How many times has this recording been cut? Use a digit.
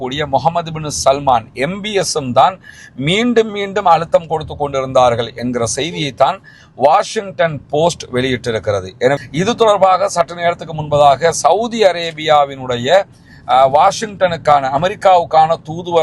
1